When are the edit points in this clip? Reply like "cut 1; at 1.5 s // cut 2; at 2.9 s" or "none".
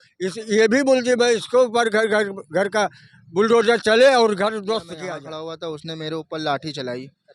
cut 1; at 4.9 s